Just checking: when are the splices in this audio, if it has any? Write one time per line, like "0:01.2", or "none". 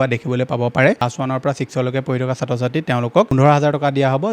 0:01.1